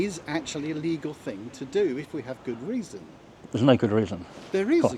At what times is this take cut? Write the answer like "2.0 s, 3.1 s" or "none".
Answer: none